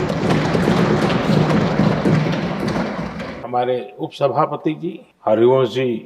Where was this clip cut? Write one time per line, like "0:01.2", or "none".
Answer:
0:03.3
0:05.1